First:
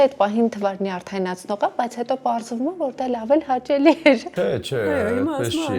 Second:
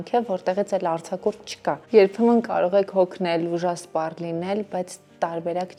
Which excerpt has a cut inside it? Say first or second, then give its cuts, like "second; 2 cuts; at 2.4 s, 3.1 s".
first; 1 cut; at 4.3 s